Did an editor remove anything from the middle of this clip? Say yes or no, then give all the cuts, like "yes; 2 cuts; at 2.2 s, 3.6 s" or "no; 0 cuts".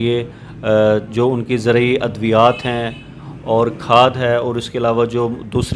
no; 0 cuts